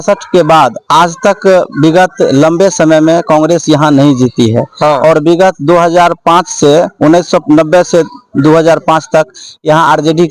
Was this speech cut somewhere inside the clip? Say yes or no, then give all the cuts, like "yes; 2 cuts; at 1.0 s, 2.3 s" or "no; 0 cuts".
no; 0 cuts